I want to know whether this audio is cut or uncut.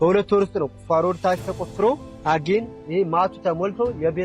cut